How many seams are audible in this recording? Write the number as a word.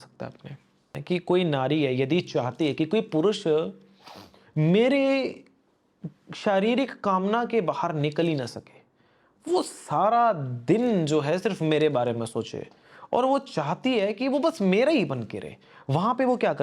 one